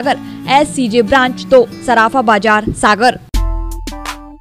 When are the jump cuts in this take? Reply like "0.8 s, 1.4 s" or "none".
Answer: 3.2 s